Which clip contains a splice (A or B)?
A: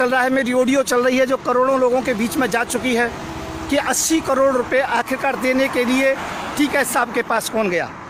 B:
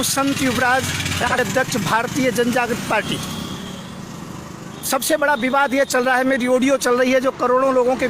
B